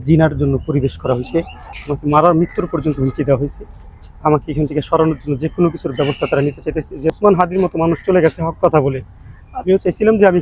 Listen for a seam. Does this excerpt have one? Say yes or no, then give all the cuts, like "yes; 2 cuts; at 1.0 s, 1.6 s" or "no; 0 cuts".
yes; 2 cuts; at 1.6 s, 7.1 s